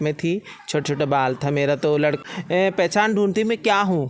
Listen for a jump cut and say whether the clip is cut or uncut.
cut